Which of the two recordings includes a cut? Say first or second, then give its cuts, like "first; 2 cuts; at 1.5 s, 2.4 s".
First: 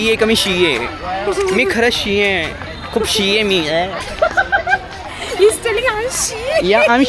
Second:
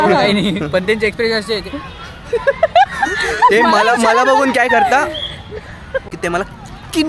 second; 1 cut; at 6.1 s